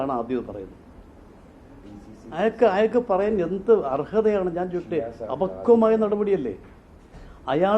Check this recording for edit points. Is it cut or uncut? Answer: uncut